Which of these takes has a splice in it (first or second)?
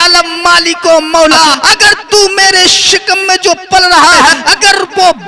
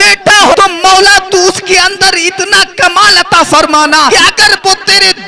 first